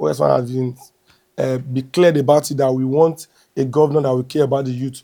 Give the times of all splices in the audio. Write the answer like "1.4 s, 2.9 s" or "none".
none

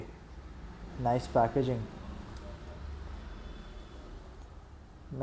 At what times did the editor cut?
none

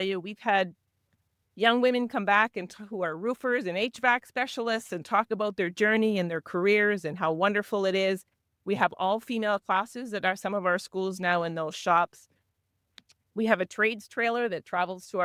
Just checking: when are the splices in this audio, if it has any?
none

